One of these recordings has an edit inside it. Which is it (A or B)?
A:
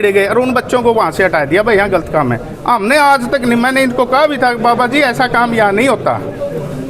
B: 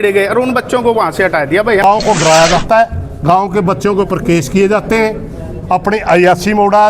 B